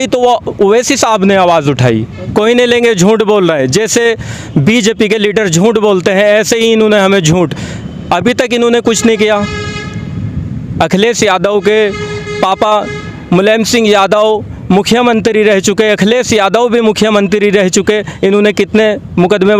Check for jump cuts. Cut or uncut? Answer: cut